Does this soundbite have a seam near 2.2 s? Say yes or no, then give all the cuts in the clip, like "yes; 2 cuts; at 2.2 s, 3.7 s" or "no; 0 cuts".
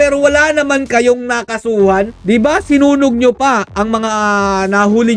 yes; 1 cut; at 2.2 s